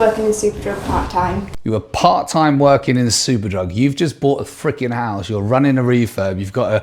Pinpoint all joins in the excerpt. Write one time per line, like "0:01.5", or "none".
none